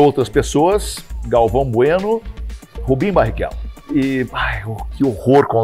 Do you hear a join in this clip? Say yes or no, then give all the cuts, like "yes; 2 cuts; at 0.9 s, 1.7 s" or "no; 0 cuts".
no; 0 cuts